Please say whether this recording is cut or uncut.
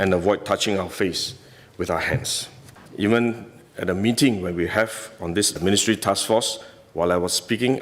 cut